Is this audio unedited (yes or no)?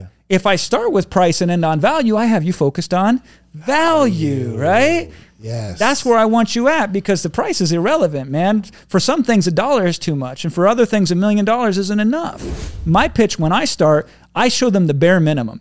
no